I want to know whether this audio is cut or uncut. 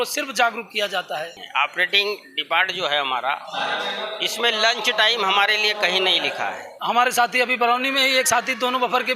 cut